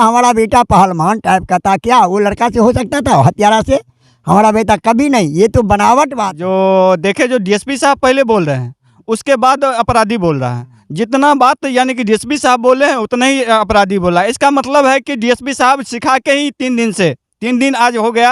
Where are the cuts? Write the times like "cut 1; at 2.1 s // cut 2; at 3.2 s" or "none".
cut 1; at 6.3 s